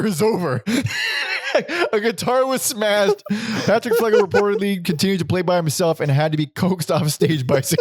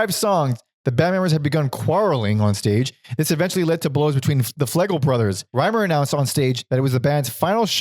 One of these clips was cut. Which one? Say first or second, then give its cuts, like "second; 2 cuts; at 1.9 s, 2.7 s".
second; 2 cuts; at 5.4 s, 6.6 s